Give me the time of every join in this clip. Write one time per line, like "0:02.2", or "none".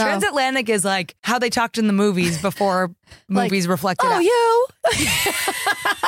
0:01.1